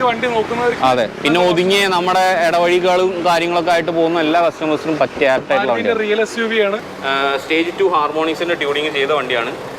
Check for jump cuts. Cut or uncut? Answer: cut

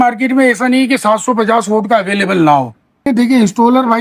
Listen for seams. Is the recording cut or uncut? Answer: cut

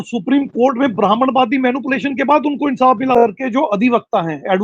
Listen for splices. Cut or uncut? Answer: cut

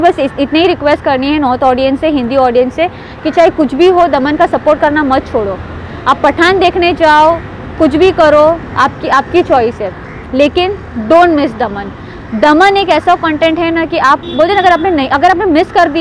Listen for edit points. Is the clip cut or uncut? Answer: uncut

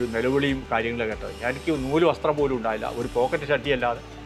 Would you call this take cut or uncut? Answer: uncut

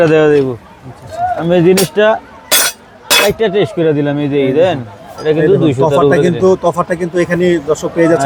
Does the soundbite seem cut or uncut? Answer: uncut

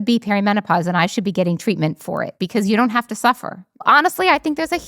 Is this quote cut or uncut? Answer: cut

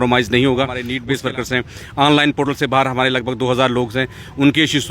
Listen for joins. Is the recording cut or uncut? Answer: cut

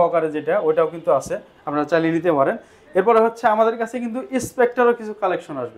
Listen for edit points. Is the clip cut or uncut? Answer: uncut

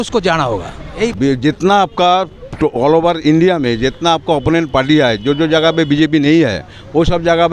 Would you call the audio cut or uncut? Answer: cut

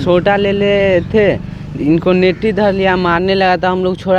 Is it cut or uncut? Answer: uncut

